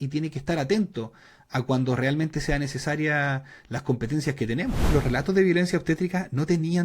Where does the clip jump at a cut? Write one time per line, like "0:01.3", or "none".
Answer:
0:04.9